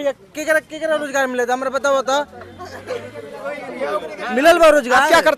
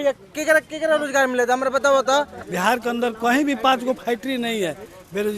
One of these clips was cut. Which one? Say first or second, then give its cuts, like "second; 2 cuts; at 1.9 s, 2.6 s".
second; 1 cut; at 2.4 s